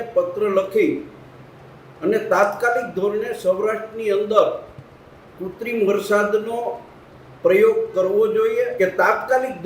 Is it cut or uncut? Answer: cut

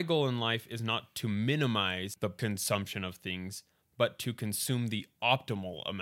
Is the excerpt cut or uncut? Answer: uncut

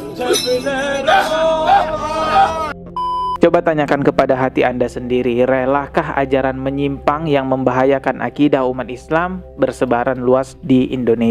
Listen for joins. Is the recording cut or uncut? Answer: cut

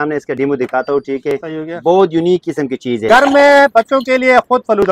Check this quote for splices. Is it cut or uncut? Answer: cut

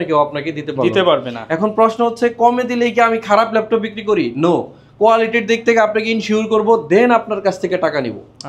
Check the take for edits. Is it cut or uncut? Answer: uncut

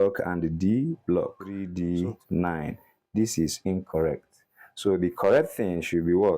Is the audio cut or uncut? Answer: cut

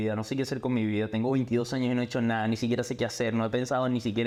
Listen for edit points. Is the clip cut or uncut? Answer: uncut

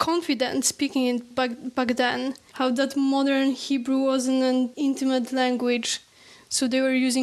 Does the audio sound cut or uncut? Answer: cut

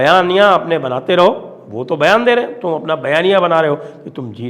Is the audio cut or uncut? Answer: uncut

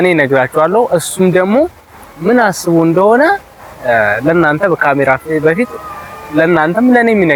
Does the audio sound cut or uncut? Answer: uncut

